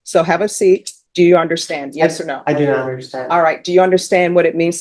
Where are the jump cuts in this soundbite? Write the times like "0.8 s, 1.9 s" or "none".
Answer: 1.0 s